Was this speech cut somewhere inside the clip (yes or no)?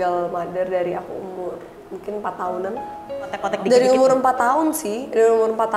yes